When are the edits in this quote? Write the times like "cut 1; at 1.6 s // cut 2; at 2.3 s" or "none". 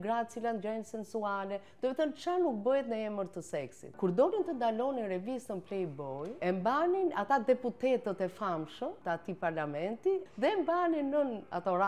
cut 1; at 3.8 s // cut 2; at 6.4 s // cut 3; at 9.0 s // cut 4; at 10.3 s